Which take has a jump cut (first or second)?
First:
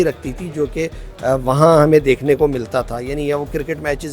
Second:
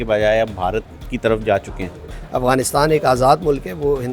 second